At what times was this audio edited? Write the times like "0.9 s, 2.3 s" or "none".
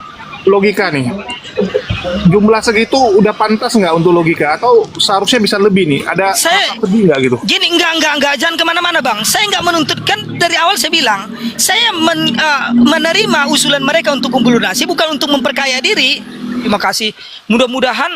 16.7 s